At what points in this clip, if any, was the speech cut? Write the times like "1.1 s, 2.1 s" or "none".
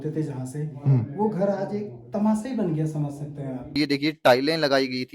3.7 s